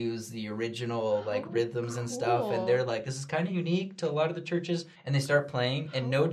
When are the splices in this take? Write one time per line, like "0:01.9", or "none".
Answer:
0:05.0